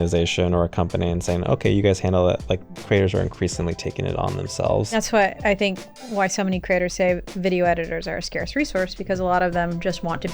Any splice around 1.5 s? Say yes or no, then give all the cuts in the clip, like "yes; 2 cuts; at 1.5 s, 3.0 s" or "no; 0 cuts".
no; 1 cut; at 5.0 s